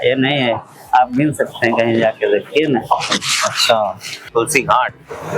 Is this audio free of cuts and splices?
no; 1 cut; at 4.3 s

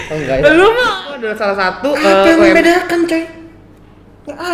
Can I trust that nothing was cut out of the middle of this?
no; 1 cut; at 1.1 s

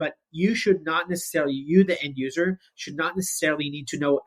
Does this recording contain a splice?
no; 0 cuts

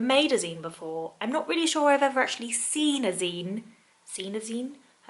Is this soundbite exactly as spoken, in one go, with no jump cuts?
yes; 0 cuts

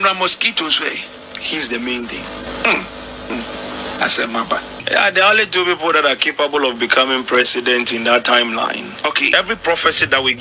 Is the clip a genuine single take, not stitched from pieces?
no; 4 cuts; at 2.5 s, 3.3 s, 4.8 s, 9.3 s

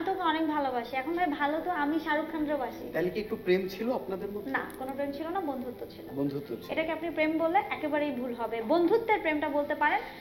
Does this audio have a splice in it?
no; 0 cuts

